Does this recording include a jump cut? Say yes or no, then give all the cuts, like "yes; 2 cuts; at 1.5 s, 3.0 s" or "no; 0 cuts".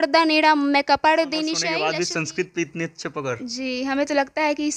yes; 1 cut; at 1.7 s